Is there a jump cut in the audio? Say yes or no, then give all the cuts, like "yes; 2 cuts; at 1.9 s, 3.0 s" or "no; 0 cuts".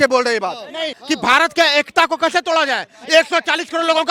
yes; 1 cut; at 1.0 s